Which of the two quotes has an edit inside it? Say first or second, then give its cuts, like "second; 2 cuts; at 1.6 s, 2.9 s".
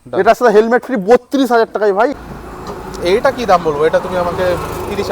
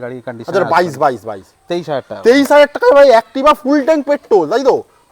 first; 1 cut; at 2.1 s